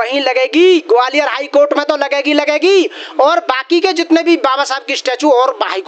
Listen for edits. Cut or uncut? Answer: uncut